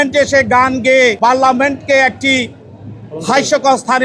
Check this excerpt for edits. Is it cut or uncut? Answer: cut